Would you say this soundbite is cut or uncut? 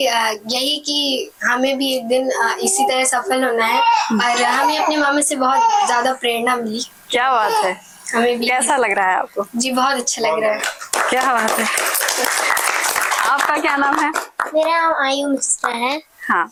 uncut